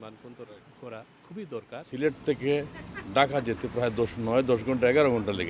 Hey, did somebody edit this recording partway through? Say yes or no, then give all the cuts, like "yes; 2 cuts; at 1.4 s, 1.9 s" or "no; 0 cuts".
yes; 1 cut; at 1.9 s